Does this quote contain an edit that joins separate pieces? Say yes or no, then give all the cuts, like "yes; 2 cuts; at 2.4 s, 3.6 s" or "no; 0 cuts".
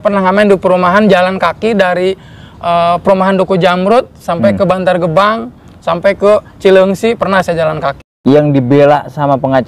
yes; 1 cut; at 8.1 s